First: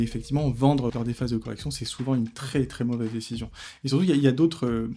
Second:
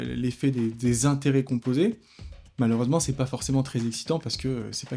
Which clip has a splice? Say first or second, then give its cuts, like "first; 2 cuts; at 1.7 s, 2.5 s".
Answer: first; 1 cut; at 0.9 s